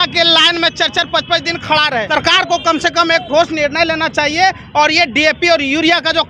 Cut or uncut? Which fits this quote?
cut